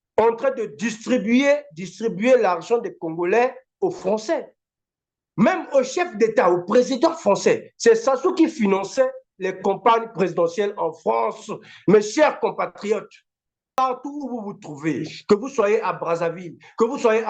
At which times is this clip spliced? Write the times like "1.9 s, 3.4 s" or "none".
13.8 s